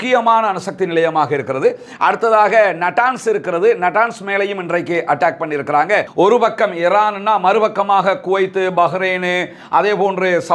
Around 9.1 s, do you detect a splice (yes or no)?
no